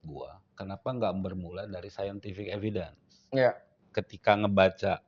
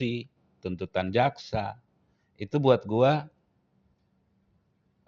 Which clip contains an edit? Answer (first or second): first